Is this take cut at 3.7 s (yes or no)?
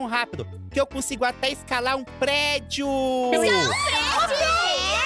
yes